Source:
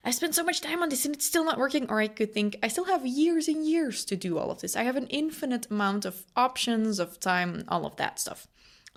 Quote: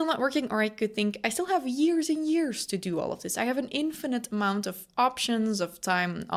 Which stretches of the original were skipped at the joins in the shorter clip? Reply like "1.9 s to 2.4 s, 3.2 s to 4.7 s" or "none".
none